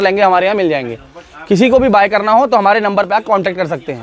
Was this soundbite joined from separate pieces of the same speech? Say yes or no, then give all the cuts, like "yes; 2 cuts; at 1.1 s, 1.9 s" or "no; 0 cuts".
no; 0 cuts